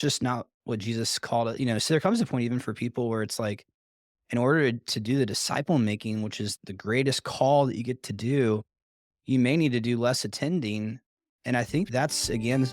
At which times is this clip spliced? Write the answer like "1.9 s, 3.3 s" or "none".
6.5 s, 11.9 s